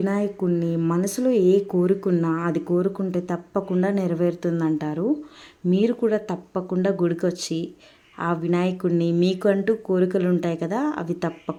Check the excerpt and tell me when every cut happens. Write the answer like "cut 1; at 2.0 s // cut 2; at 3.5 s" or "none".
none